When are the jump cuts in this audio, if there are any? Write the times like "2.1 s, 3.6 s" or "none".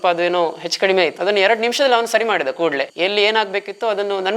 1.2 s, 2.9 s